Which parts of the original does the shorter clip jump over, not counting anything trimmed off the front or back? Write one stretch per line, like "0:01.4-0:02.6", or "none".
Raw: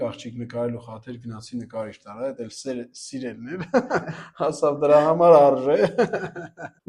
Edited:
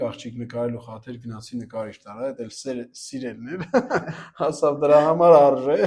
none